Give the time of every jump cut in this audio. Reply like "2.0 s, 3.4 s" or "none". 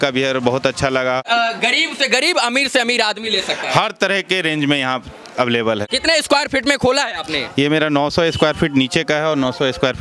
1.2 s, 5.8 s

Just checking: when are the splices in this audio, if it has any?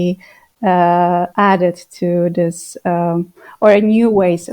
1.3 s

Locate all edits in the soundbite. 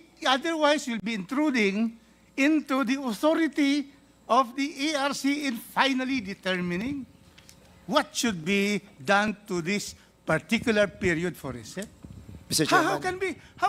none

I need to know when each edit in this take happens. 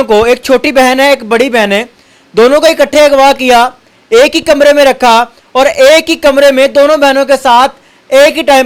none

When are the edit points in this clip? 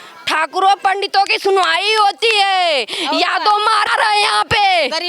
3.9 s

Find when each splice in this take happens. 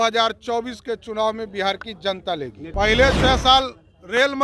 2.6 s

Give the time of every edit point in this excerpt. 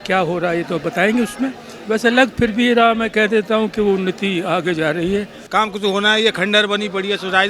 5.4 s

